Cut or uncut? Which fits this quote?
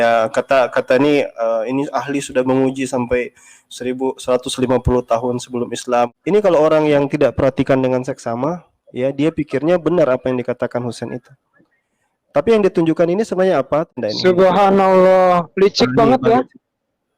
cut